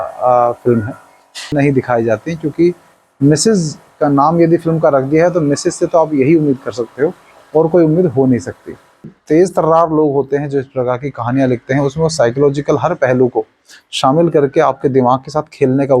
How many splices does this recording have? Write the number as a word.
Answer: two